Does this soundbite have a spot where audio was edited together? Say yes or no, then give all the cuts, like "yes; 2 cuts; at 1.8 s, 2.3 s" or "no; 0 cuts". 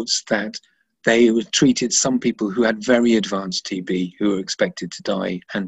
no; 0 cuts